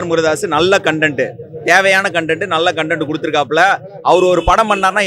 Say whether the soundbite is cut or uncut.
uncut